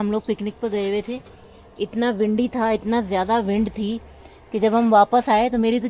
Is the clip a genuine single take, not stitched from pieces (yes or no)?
yes